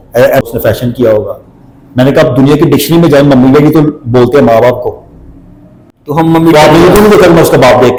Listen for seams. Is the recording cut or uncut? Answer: uncut